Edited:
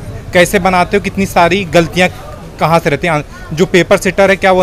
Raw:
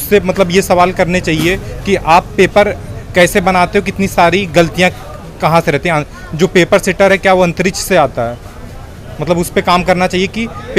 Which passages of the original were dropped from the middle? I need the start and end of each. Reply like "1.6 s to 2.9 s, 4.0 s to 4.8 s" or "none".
none